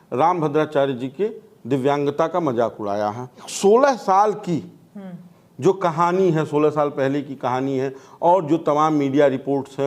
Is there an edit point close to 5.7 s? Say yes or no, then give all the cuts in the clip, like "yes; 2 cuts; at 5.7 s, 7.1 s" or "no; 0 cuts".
no; 1 cut; at 3.5 s